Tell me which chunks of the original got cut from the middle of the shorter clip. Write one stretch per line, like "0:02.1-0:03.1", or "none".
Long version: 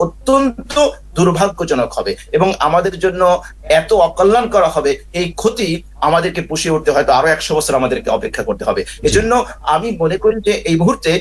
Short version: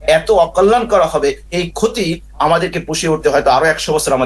none